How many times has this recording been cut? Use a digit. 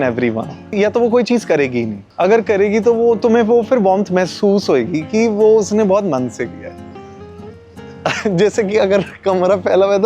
2